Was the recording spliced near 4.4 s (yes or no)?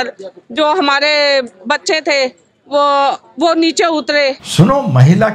yes